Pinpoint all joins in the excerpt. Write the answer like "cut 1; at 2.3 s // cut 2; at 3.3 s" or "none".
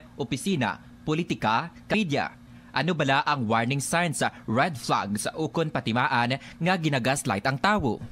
cut 1; at 1.9 s

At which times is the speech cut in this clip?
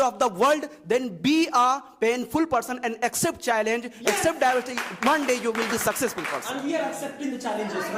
none

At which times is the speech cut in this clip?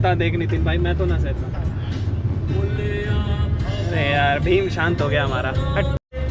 none

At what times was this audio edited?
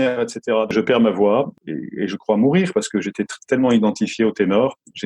cut 1; at 0.7 s // cut 2; at 1.6 s

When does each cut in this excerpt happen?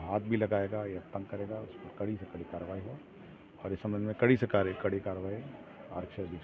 none

